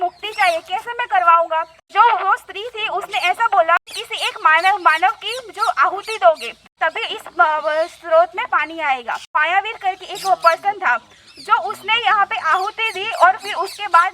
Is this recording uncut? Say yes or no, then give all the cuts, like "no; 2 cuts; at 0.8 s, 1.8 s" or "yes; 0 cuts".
no; 4 cuts; at 1.9 s, 3.8 s, 6.7 s, 9.4 s